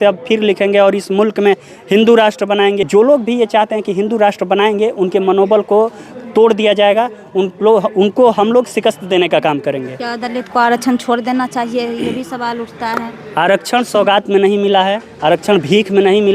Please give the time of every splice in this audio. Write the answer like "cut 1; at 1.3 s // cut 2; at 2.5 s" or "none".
cut 1; at 2.8 s // cut 2; at 9.9 s